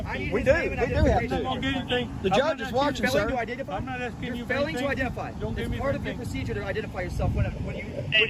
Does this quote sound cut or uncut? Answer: uncut